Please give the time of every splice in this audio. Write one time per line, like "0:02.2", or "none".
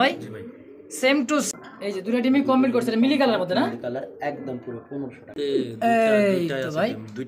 0:01.5
0:05.2

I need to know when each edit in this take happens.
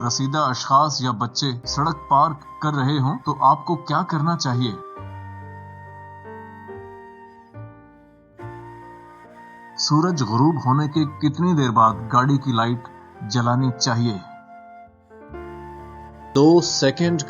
0:05.0
0:09.8
0:14.2
0:16.3

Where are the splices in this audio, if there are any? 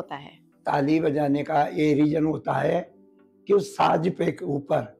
none

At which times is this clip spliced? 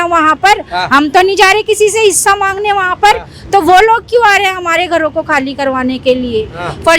none

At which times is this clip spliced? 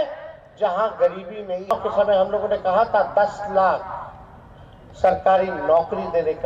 0:01.7

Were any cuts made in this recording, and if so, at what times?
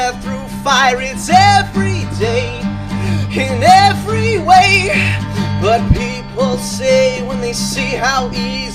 none

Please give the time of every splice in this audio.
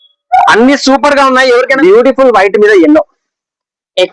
0:01.7

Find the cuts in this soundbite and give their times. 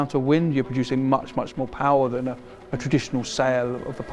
none

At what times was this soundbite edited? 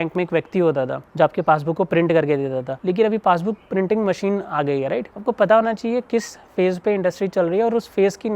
none

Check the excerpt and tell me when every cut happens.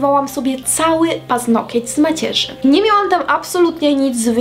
none

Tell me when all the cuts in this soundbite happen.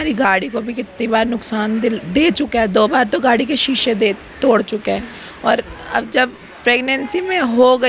none

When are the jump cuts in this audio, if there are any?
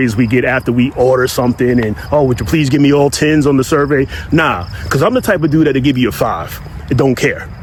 none

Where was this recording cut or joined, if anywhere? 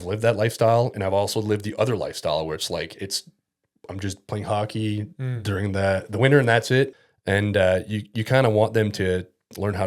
0:07.0

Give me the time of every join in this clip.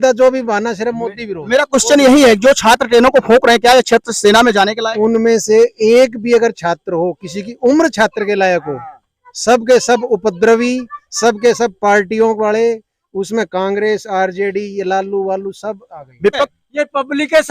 0:16.5

